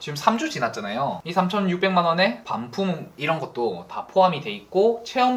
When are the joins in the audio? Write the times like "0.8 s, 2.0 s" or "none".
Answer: none